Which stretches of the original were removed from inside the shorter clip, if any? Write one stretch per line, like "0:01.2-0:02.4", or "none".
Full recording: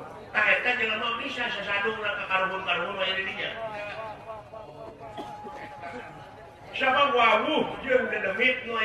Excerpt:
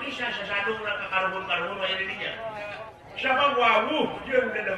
0:04.0-0:06.4